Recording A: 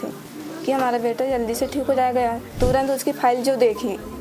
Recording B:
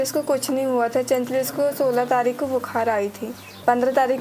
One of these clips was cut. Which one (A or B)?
A